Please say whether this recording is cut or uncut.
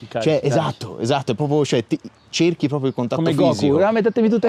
uncut